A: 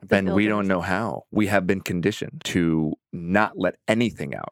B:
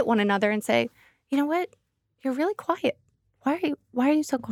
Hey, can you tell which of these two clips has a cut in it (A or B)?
A